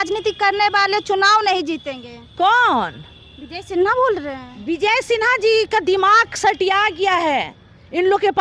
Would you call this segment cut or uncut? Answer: uncut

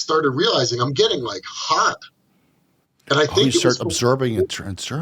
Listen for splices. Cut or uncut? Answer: uncut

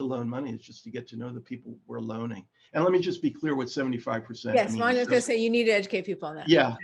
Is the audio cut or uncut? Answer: cut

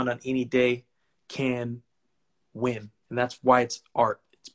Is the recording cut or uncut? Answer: cut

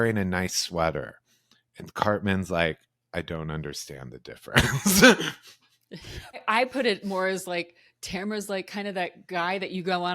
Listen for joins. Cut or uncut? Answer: cut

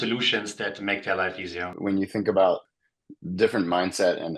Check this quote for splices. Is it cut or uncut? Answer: cut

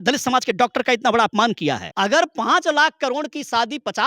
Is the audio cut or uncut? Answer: cut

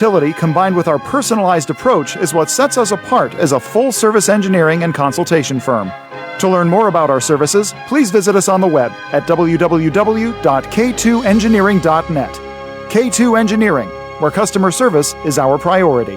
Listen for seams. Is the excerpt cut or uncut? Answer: uncut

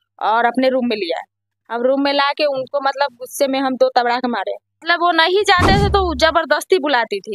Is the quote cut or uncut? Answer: cut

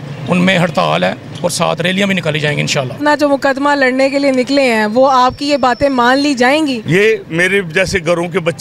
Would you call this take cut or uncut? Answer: cut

